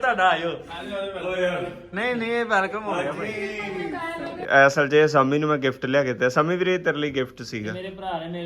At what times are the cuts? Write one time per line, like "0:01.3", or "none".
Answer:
0:04.4